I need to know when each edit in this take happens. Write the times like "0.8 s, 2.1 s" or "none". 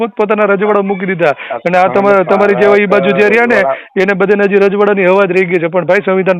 none

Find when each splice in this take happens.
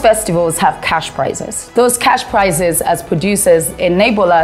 1.7 s

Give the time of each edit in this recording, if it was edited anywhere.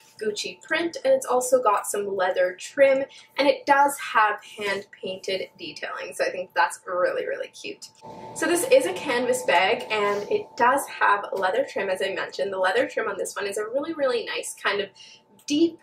7.9 s

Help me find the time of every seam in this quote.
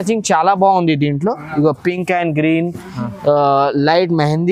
none

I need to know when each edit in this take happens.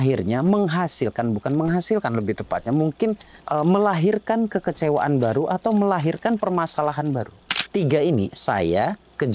7.7 s

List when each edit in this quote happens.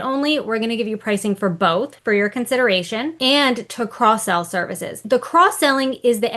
1.9 s, 3.1 s, 5.0 s

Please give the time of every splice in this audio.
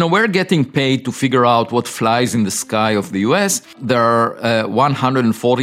3.7 s

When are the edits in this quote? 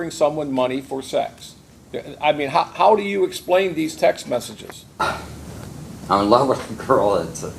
5.0 s, 6.0 s

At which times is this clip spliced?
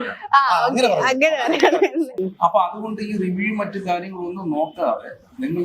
2.3 s

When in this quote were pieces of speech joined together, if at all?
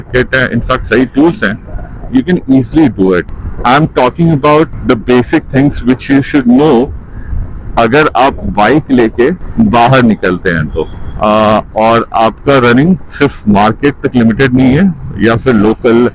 none

